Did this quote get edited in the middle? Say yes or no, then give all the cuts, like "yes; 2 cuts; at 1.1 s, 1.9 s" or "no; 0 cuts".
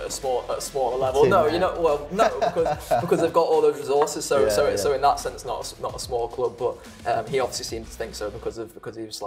no; 0 cuts